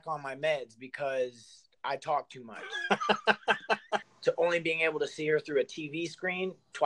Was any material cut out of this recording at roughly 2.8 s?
no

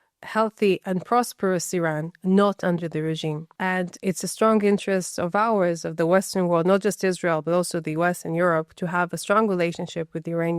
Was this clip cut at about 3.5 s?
yes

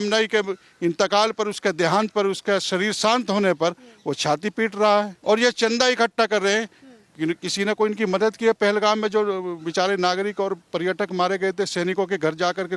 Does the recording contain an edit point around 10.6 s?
no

